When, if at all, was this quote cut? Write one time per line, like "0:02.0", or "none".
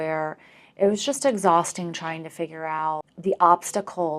0:03.1